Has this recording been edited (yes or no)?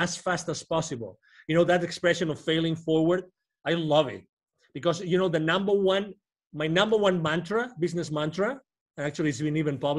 no